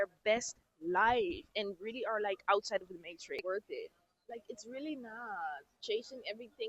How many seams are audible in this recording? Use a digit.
1